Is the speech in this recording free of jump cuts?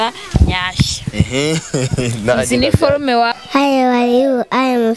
no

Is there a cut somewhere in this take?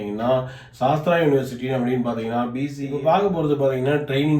yes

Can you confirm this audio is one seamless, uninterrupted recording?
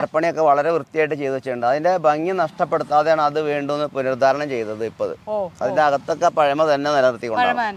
yes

